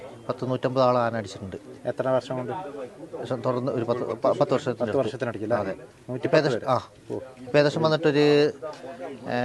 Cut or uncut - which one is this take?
uncut